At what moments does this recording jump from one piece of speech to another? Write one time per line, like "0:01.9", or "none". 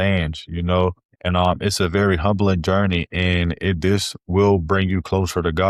0:01.2